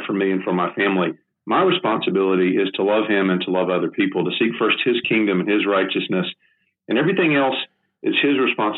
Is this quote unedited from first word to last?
yes; 0 cuts

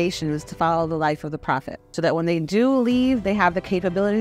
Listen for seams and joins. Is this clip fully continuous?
no; 1 cut; at 1.8 s

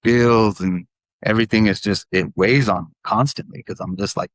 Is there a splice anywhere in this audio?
no; 0 cuts

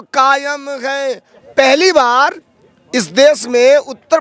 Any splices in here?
yes; 1 cut; at 1.3 s

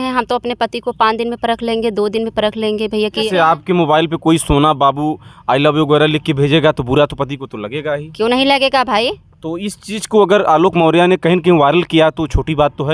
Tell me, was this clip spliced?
yes; 1 cut; at 3.2 s

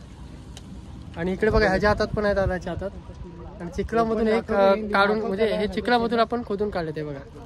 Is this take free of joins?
yes; 0 cuts

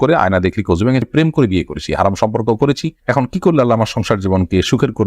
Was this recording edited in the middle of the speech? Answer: yes; 1 cut; at 1.0 s

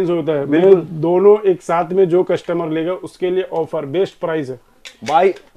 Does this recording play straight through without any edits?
yes; 0 cuts

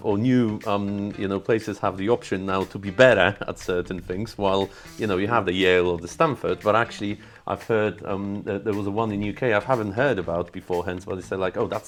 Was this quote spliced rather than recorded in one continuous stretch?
no; 0 cuts

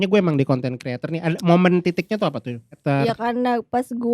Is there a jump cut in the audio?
yes; 1 cut; at 2.8 s

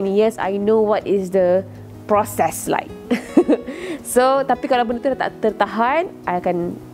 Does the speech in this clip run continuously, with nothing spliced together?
yes; 0 cuts

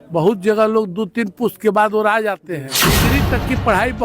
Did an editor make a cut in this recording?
yes; 1 cut; at 3.0 s

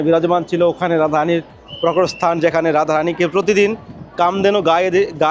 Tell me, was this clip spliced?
no; 0 cuts

